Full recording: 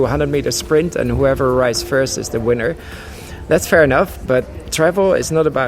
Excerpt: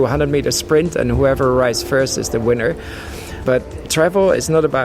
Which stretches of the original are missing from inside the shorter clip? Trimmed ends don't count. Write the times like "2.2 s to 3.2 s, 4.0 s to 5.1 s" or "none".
3.4 s to 4.2 s